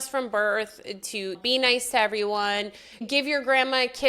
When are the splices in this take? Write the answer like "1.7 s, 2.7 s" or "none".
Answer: 3.0 s